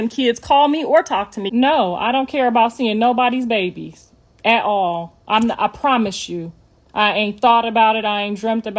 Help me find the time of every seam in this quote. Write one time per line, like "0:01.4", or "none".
0:01.4

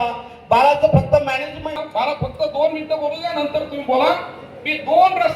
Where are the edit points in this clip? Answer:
0:01.8

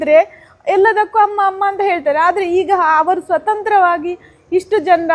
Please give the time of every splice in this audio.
none

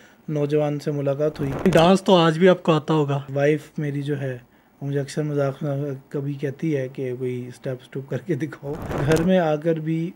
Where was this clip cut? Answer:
0:01.7
0:03.2
0:09.0

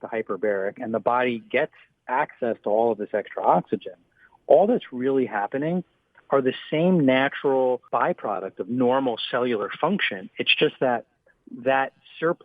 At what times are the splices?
0:07.8

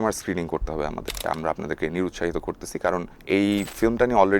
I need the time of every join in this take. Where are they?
0:01.2
0:03.1

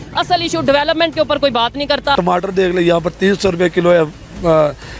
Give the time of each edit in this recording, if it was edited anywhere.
0:02.1

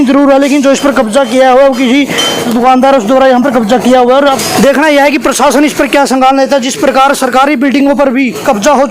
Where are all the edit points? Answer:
0:02.5
0:04.4

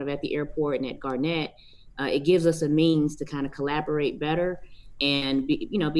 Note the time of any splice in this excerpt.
none

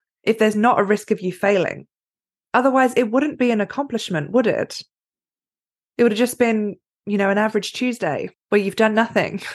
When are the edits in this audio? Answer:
0:08.3

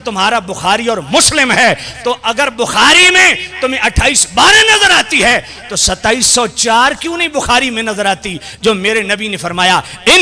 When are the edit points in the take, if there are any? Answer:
none

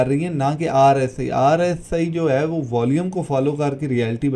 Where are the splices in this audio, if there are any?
none

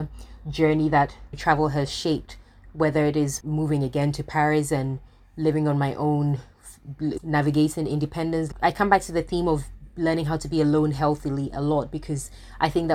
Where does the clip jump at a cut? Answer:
0:03.4

